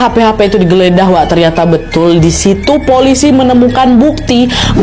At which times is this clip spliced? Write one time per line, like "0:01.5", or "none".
none